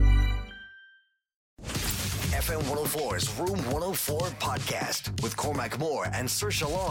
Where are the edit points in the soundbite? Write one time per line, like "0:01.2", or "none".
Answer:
0:01.6